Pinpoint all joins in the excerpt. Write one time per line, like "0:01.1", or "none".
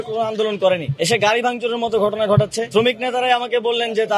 0:00.9
0:02.7